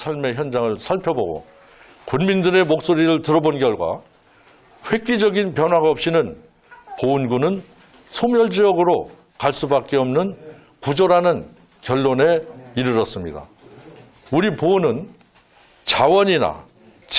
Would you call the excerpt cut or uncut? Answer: uncut